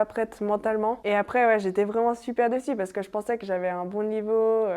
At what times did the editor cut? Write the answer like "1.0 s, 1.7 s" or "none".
1.0 s

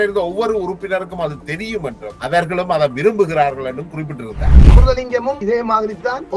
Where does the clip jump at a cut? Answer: 4.6 s

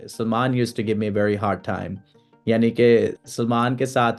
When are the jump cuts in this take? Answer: none

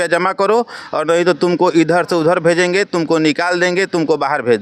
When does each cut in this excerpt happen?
none

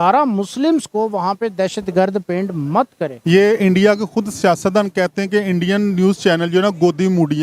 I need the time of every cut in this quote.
3.1 s

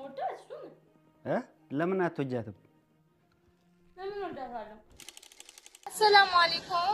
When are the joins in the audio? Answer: 4.9 s

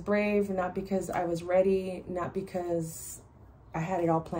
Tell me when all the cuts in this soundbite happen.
none

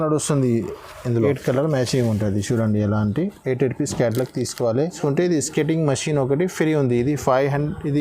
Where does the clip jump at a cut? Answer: 1.1 s, 5.0 s

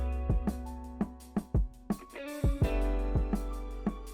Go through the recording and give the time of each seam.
none

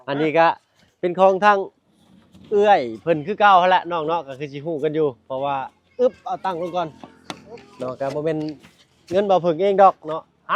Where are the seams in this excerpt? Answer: none

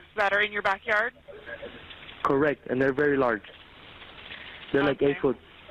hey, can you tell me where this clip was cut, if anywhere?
none

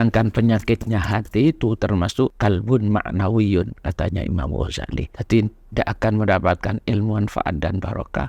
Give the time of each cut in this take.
2.4 s, 5.1 s

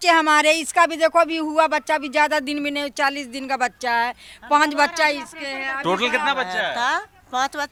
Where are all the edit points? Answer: none

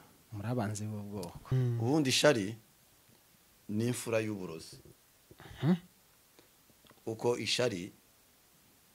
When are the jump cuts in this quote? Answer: 1.4 s

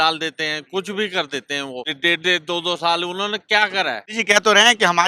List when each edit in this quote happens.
1.9 s, 4.1 s

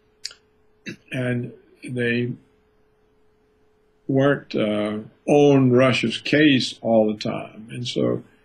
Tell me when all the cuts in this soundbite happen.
4.4 s

